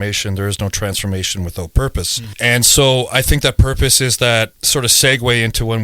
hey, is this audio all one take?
no; 1 cut; at 2.3 s

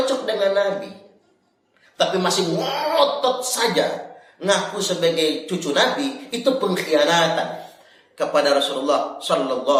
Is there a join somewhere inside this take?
no; 0 cuts

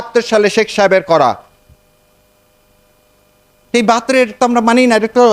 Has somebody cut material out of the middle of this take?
no; 0 cuts

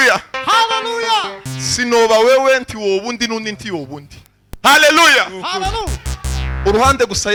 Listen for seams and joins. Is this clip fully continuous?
yes; 0 cuts

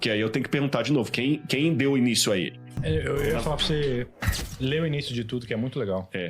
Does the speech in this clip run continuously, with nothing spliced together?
no; 1 cut; at 2.6 s

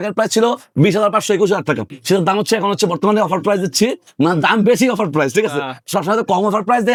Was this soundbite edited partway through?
no; 0 cuts

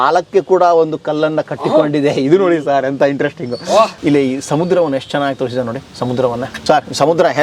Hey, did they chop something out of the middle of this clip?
yes; 2 cuts; at 4.0 s, 6.5 s

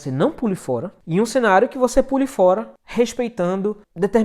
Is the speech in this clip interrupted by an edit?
yes; 2 cuts; at 1.0 s, 2.8 s

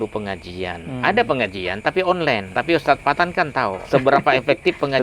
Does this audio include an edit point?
yes; 2 cuts; at 2.5 s, 3.8 s

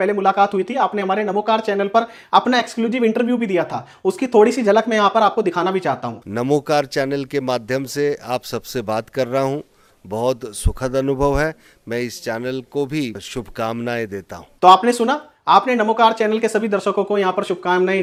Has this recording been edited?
no; 0 cuts

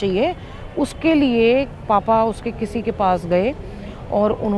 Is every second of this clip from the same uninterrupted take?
yes; 0 cuts

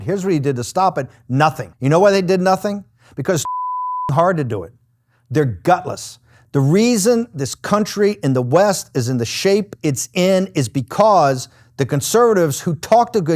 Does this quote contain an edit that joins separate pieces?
yes; 1 cut; at 1.7 s

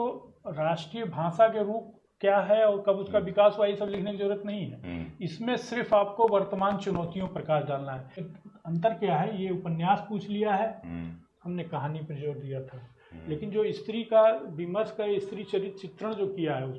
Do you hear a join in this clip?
yes; 1 cut; at 8.2 s

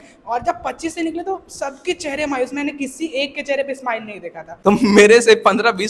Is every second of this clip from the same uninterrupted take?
no; 1 cut; at 4.5 s

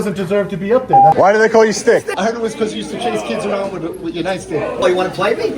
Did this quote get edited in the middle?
yes; 3 cuts; at 1.1 s, 2.1 s, 4.8 s

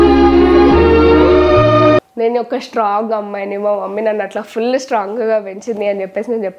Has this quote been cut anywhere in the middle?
yes; 1 cut; at 2.1 s

